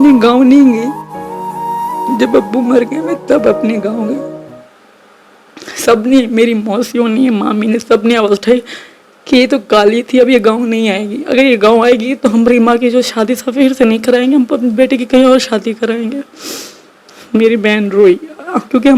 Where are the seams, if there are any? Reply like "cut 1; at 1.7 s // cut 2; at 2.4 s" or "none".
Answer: none